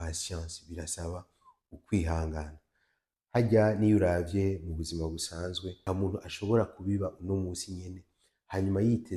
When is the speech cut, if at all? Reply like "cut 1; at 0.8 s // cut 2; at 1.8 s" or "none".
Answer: cut 1; at 5.7 s